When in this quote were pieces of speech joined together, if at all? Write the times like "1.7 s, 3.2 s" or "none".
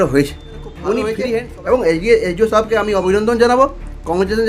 1.2 s